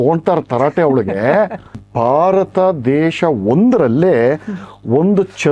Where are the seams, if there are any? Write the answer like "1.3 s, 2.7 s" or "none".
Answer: 1.8 s

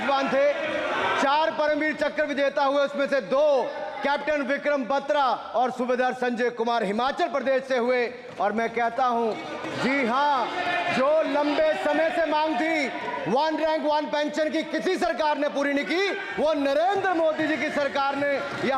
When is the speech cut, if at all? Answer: none

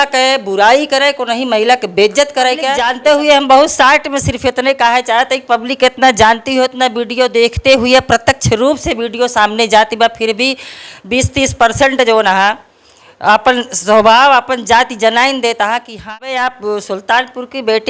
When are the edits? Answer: 2.8 s, 15.9 s

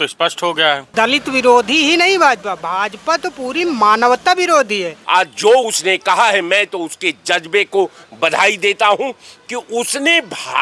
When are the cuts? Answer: 0.9 s, 4.9 s

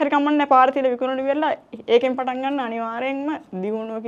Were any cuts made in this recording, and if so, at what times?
none

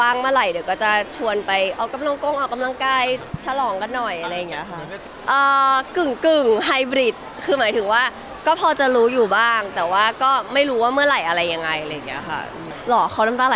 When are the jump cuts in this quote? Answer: 5.0 s, 12.7 s

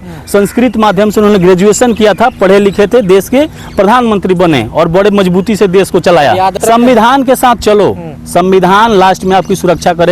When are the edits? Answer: 6.6 s

